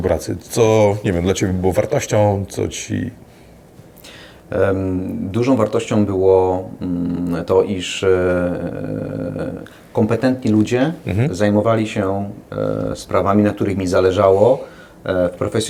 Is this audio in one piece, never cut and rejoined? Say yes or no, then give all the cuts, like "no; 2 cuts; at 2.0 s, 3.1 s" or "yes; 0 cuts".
yes; 0 cuts